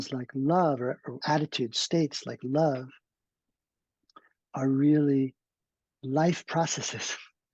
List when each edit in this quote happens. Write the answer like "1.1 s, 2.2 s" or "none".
1.1 s

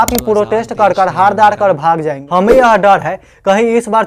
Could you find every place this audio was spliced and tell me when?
2.2 s

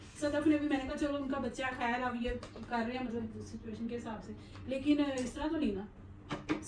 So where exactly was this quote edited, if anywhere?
none

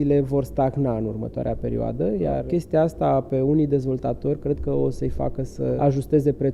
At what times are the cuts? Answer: 2.4 s, 5.8 s

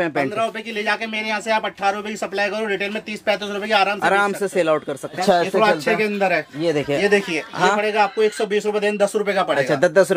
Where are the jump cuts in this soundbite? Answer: 5.2 s

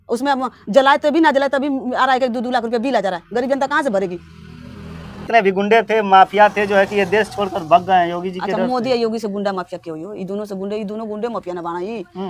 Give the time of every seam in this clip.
5.3 s

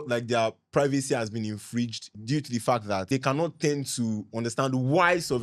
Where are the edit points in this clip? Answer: 2.1 s, 3.1 s

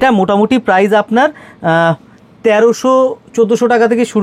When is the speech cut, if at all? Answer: none

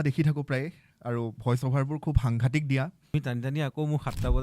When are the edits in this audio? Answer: 3.1 s

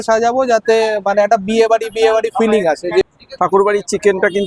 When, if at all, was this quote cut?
3.0 s

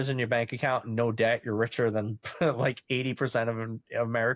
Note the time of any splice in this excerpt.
none

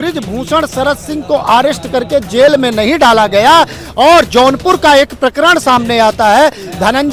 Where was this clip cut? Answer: none

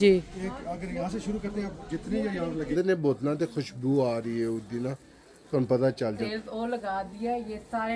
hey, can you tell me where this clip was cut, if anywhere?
2.7 s, 6.2 s

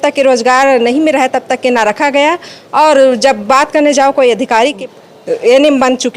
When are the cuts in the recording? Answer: 4.8 s

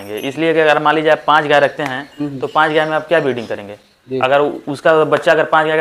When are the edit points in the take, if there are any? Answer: none

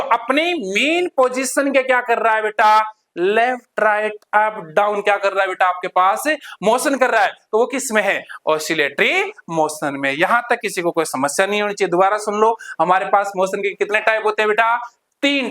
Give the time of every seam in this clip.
none

